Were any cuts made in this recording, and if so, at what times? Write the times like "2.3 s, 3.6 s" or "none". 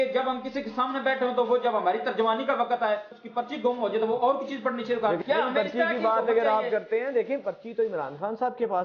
3.1 s, 5.2 s